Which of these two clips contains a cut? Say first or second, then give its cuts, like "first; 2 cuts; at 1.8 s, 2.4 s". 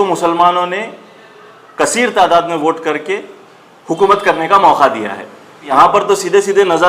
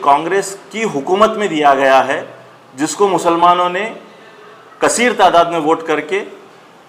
first; 1 cut; at 5.7 s